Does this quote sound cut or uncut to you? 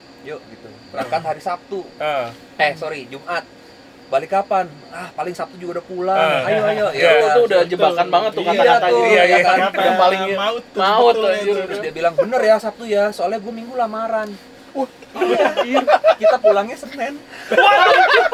uncut